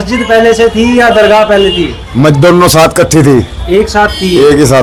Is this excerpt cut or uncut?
uncut